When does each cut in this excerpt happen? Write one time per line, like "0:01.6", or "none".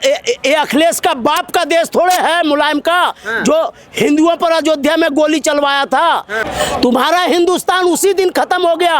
0:06.4